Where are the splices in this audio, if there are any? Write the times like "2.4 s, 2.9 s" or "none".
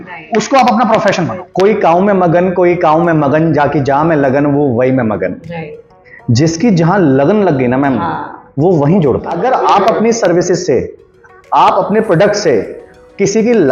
1.4 s, 9.4 s

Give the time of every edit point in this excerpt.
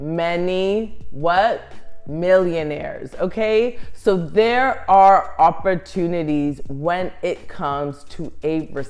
none

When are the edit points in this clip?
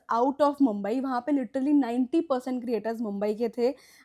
none

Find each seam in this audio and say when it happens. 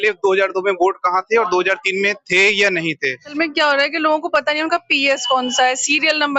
3.3 s

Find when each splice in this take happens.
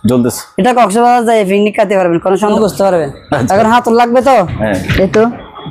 2.6 s

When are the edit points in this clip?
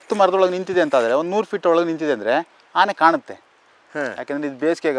none

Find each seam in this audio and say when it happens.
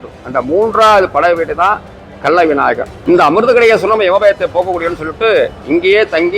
2.9 s

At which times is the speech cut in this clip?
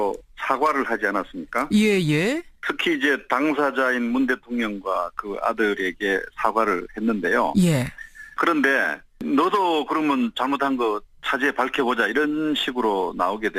none

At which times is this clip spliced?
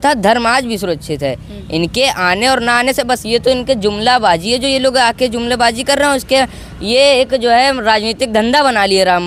none

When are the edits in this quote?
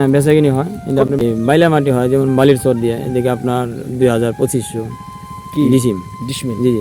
1.2 s

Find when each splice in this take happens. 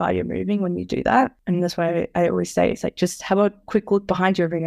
1.4 s

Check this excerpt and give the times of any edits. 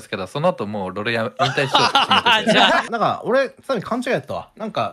2.9 s

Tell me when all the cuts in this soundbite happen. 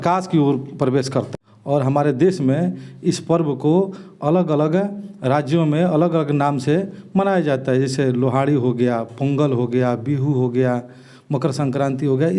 1.3 s

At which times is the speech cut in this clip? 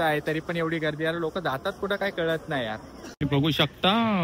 3.2 s

